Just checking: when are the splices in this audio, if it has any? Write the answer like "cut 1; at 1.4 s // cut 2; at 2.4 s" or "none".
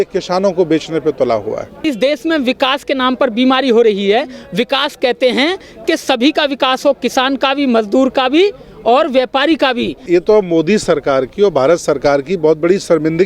cut 1; at 1.8 s // cut 2; at 10.0 s